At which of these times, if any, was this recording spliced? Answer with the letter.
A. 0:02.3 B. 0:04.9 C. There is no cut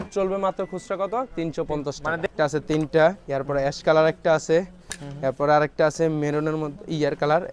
A